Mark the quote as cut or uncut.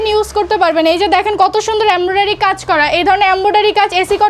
uncut